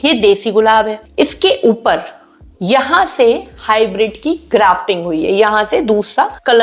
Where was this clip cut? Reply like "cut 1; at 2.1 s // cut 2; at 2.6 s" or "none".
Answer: none